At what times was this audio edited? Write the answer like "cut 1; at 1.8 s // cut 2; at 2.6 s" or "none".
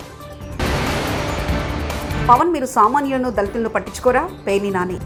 none